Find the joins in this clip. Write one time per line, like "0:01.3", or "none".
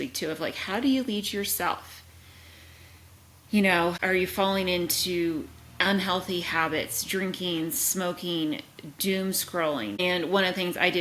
0:04.0
0:10.0